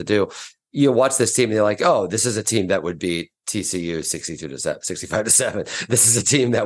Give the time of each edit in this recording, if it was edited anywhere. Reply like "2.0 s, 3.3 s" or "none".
none